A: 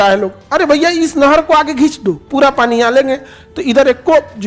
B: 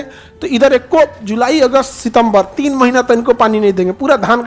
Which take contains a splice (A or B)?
A